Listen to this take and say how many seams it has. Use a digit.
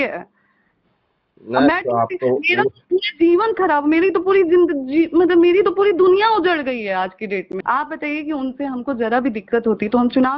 1